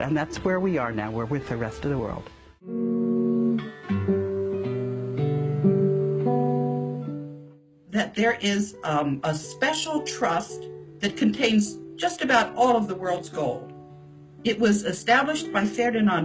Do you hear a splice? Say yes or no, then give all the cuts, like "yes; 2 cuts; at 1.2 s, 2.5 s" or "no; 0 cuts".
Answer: yes; 1 cut; at 1.7 s